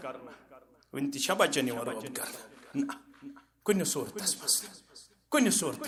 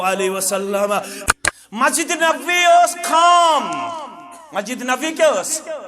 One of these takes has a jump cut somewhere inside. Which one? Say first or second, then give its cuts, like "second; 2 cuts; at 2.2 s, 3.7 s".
second; 1 cut; at 1.2 s